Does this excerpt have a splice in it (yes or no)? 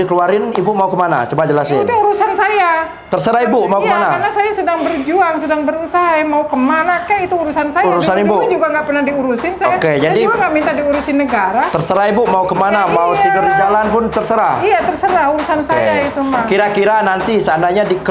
no